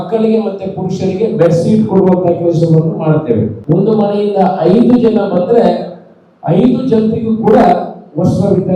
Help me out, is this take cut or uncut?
cut